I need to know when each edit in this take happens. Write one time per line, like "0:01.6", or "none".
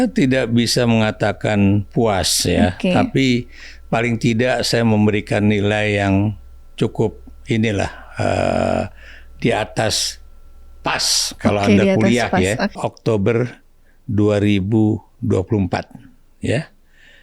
0:12.8